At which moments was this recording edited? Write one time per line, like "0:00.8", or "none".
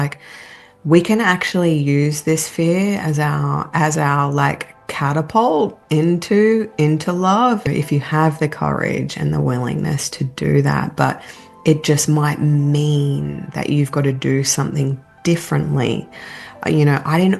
0:07.7